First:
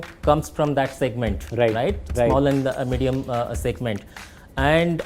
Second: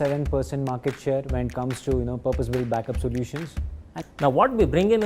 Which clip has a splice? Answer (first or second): second